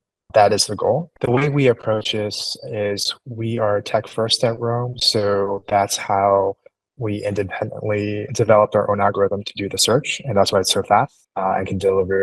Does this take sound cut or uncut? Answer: cut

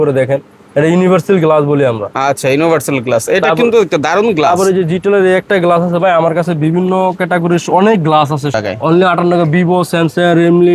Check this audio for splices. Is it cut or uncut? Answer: cut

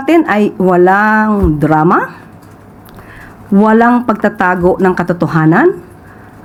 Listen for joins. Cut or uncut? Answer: uncut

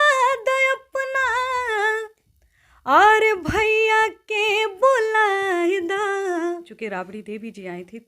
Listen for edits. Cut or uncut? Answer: cut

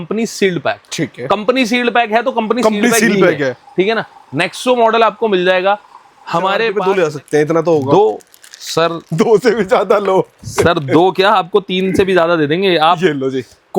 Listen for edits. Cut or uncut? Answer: cut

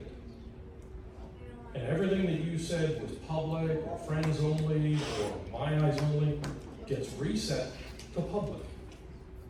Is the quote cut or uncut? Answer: uncut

